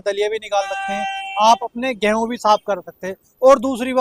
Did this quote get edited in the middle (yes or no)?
no